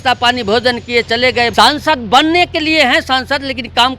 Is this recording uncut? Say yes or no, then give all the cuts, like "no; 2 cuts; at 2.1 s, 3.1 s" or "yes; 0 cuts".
no; 1 cut; at 1.5 s